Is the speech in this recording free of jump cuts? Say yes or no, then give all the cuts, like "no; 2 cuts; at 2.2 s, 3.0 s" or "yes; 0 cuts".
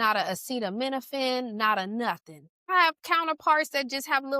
no; 1 cut; at 2.6 s